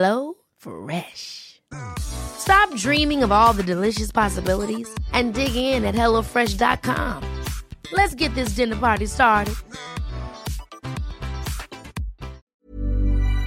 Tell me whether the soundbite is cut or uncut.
cut